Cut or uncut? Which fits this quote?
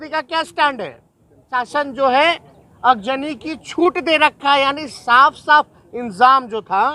cut